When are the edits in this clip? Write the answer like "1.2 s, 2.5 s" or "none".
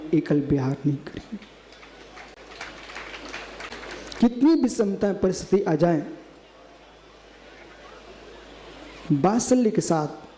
none